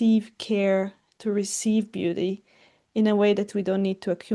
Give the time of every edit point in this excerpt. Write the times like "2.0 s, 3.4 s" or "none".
none